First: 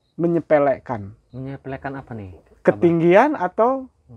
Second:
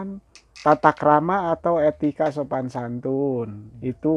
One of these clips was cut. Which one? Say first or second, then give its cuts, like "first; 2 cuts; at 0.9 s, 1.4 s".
first; 1 cut; at 1.2 s